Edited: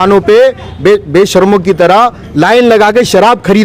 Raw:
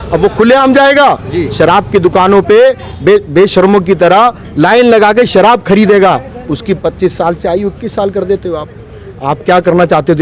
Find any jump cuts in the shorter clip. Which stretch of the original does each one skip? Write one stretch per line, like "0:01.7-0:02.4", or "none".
none